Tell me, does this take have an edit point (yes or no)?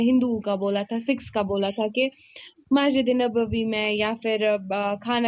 no